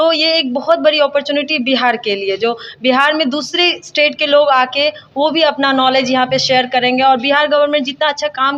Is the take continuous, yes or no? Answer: yes